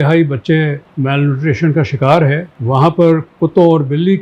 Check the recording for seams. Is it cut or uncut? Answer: uncut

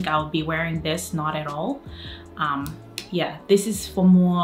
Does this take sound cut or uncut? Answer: uncut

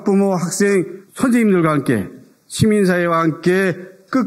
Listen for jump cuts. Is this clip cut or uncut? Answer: uncut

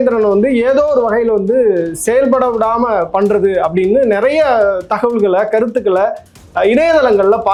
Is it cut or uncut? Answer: uncut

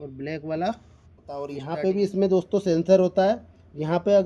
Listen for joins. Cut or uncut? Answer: cut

